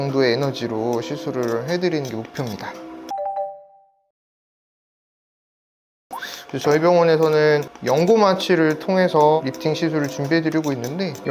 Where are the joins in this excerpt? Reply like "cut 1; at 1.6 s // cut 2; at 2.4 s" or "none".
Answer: none